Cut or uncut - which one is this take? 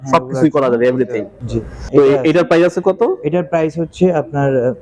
uncut